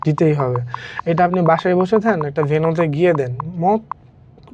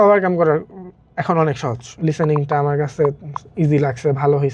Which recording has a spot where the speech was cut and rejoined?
second; 1 cut; at 1.8 s

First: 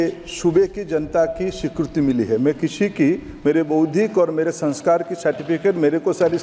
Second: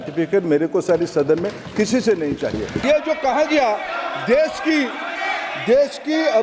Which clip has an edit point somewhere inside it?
second; 1 cut; at 2.8 s

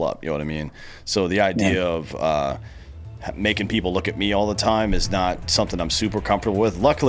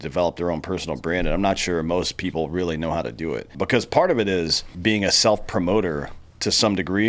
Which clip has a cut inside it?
second; 2 cuts; at 3.5 s, 4.7 s

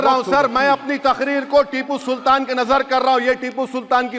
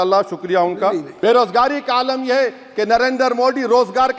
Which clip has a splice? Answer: second; 1 cut; at 1.1 s

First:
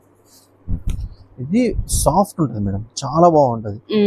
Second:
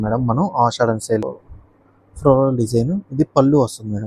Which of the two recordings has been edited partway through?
second; 1 cut; at 1.3 s

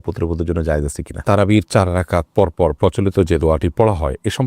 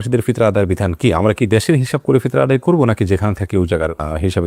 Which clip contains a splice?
first; 1 cut; at 1.1 s

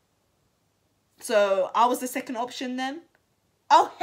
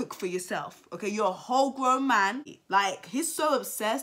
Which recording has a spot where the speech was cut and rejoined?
second; 1 cut; at 2.4 s

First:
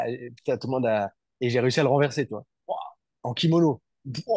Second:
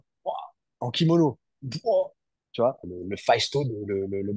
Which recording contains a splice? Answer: second; 1 cut; at 2.9 s

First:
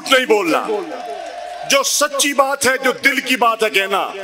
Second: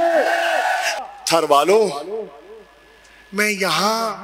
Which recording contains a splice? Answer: second; 1 cut; at 0.9 s

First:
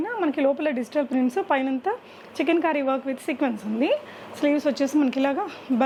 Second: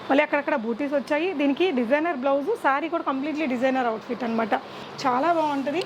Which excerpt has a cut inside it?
second; 1 cut; at 4.9 s

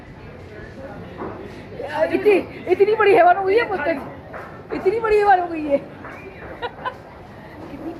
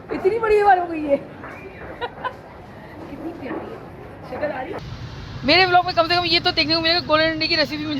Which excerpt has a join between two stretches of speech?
second; 1 cut; at 4.8 s

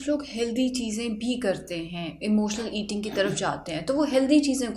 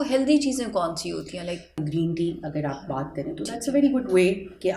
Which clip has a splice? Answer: second; 1 cut; at 1.8 s

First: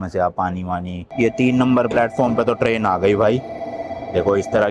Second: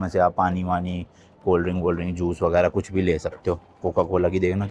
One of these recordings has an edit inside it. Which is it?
first; 1 cut; at 1.1 s

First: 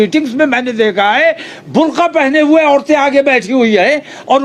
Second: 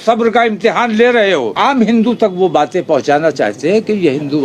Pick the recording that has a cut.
second; 1 cut; at 1.5 s

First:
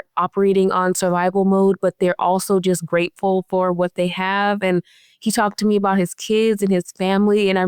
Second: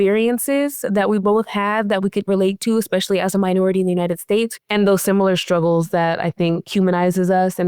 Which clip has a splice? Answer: second; 1 cut; at 4.5 s

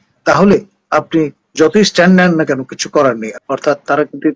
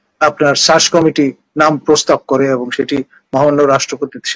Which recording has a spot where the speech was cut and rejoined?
first; 1 cut; at 3.3 s

